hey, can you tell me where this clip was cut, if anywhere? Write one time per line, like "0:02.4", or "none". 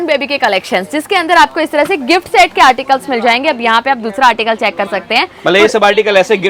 none